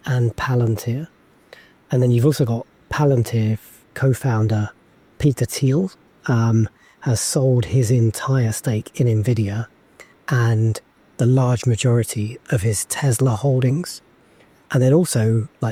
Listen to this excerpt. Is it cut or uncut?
uncut